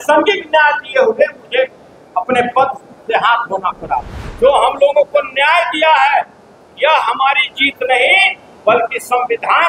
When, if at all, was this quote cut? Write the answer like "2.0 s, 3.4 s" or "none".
4.2 s